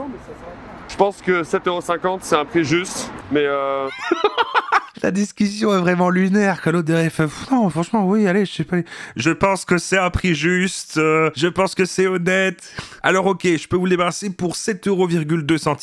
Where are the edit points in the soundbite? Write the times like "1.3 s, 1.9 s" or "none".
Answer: none